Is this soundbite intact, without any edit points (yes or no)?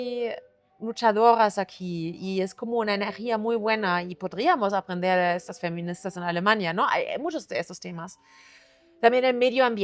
yes